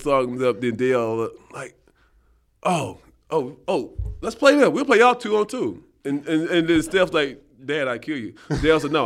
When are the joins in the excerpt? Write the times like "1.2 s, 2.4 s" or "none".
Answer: none